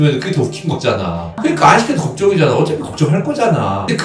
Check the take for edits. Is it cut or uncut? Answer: cut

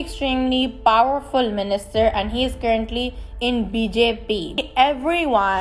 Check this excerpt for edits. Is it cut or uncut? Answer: cut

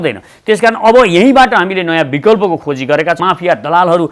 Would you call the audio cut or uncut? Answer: cut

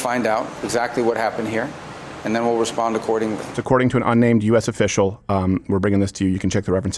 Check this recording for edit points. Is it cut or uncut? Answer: cut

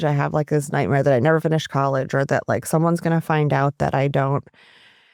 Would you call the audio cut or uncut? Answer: uncut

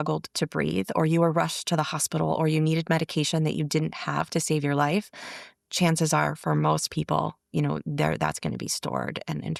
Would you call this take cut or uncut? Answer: uncut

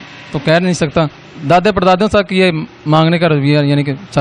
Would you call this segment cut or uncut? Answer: cut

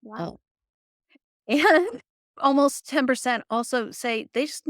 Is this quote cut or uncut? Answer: cut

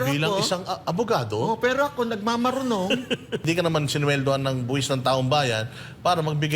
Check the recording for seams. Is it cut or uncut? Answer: cut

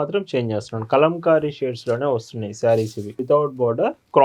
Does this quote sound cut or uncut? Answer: cut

